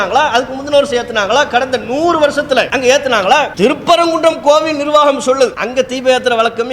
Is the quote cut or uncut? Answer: cut